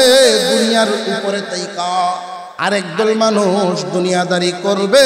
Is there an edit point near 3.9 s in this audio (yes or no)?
no